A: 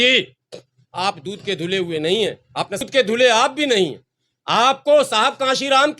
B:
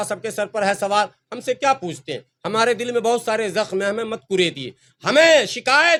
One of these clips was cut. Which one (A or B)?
A